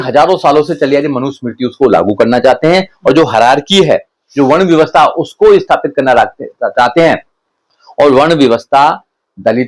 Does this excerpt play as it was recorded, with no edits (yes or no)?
yes